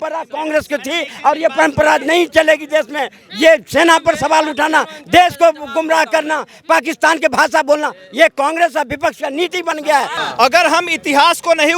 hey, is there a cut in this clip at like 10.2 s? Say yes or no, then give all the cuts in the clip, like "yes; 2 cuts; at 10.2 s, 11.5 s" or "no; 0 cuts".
yes; 1 cut; at 10.2 s